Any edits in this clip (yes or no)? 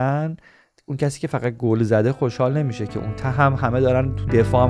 no